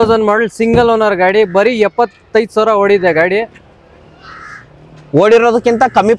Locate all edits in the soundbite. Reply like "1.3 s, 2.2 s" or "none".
none

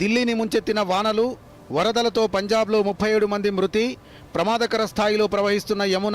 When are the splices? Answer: none

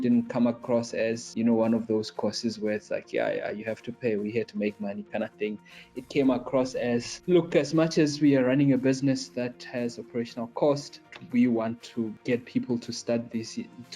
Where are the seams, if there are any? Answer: 1.2 s, 7.1 s, 11.1 s, 12.2 s

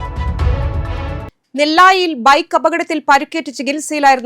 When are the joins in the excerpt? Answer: none

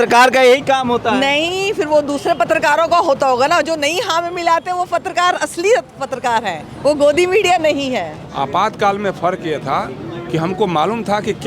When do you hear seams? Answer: 8.2 s

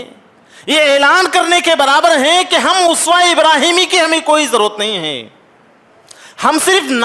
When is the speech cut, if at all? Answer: none

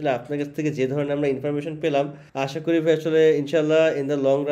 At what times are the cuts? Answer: 2.2 s

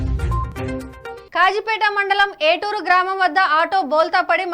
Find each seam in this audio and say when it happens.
1.2 s

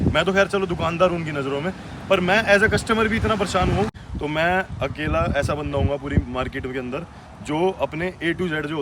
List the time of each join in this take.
4.0 s

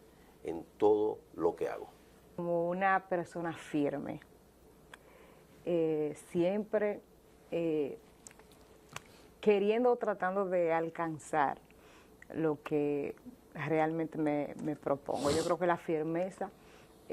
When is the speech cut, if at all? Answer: 2.4 s

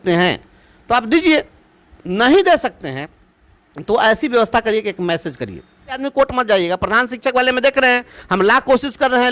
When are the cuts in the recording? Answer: 6.0 s

